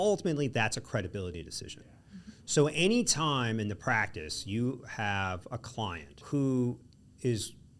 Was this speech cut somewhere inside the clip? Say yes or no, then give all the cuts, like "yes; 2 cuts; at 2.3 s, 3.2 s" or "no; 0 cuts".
yes; 1 cut; at 6.2 s